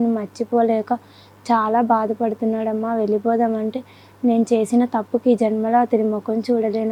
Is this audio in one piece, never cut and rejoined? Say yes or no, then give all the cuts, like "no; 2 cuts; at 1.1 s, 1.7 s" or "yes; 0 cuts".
yes; 0 cuts